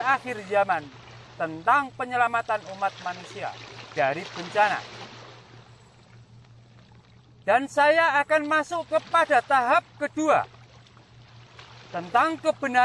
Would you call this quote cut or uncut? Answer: cut